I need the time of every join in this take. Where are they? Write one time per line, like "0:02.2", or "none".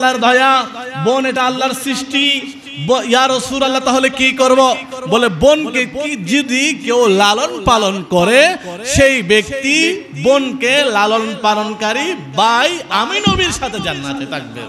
none